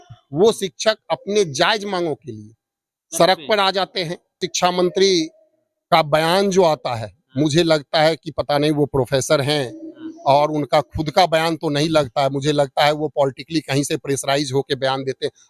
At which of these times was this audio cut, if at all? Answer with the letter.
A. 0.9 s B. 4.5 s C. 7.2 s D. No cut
B